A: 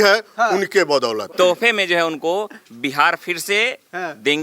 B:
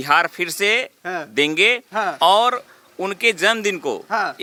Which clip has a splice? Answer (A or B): A